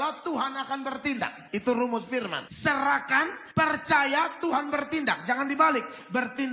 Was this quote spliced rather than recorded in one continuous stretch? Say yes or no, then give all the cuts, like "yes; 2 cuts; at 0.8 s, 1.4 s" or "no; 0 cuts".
yes; 3 cuts; at 1.4 s, 2.4 s, 3.4 s